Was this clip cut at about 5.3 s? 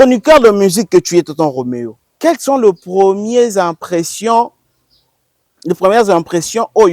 no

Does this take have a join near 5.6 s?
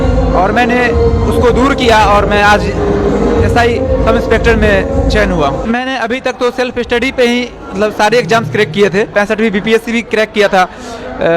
yes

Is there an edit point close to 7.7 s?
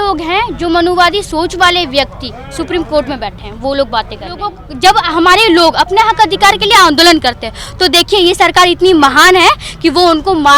no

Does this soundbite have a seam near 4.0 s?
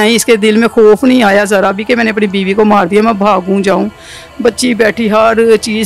no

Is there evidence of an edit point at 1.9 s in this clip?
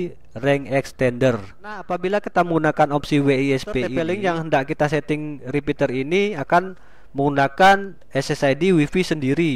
yes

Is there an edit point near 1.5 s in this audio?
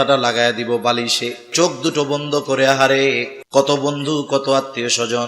yes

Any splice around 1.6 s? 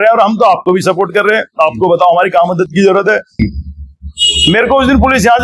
no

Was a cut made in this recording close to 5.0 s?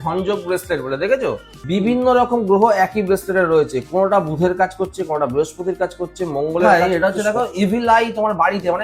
no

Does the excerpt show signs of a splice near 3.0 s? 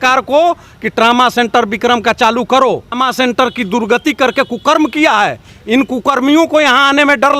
yes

